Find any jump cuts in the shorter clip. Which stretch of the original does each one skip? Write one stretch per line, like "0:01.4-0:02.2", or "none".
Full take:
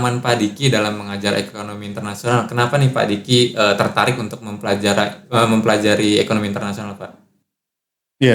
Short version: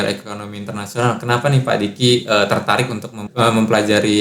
0:04.5-0:05.2